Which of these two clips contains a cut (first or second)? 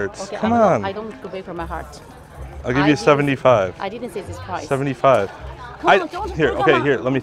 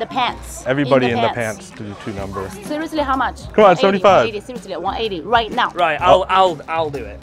second